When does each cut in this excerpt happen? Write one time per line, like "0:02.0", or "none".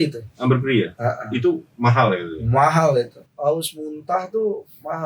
0:03.2